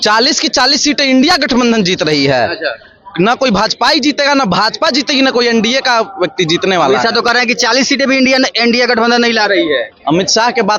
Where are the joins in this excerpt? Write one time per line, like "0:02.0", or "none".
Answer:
none